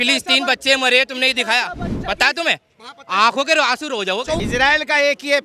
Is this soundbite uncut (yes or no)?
no